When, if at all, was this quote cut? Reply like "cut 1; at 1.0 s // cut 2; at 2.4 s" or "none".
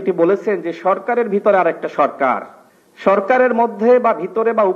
cut 1; at 2.7 s